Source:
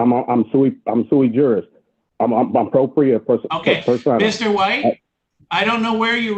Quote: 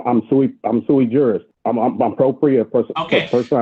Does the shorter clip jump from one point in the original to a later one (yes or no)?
yes